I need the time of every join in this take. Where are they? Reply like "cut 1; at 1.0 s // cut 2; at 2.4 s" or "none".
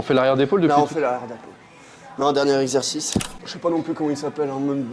cut 1; at 3.4 s